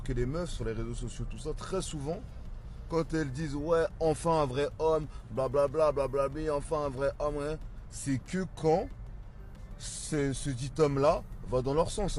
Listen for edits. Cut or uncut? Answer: uncut